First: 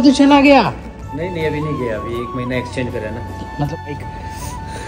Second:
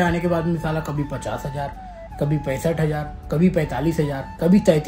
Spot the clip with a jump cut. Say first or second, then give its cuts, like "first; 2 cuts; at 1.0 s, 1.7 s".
first; 1 cut; at 3.9 s